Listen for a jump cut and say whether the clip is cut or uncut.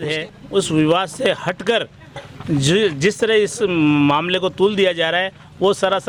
uncut